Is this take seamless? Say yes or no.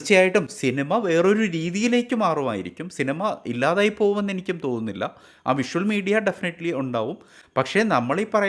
yes